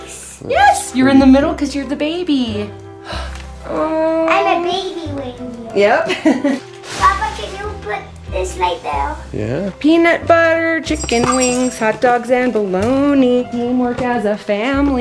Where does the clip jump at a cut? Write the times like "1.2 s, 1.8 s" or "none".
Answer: 6.6 s, 9.7 s